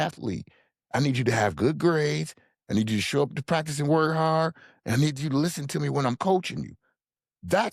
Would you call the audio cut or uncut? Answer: uncut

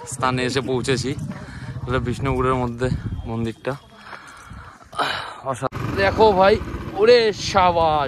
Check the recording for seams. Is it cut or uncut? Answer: cut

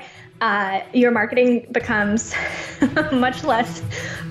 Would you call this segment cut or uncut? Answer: uncut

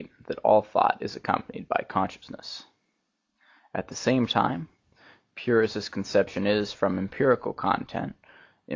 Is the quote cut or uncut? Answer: uncut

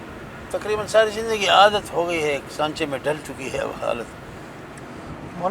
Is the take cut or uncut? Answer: uncut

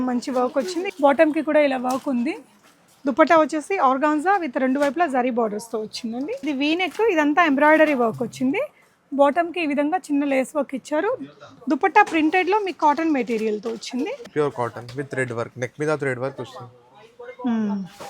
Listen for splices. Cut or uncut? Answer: cut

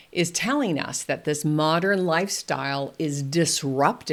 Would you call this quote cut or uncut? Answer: uncut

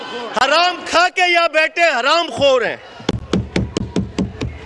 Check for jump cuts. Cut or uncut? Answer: uncut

